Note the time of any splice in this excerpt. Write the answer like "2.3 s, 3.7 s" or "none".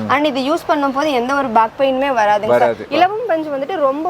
2.8 s